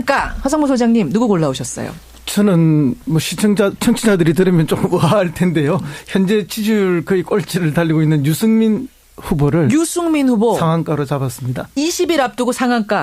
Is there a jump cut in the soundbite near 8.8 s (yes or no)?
yes